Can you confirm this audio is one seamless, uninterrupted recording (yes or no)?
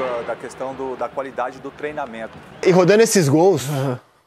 no